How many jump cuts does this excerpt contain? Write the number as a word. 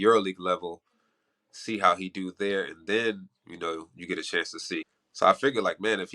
one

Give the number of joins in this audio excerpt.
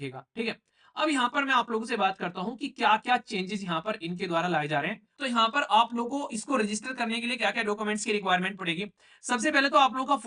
one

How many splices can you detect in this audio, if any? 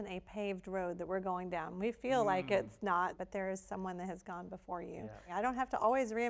two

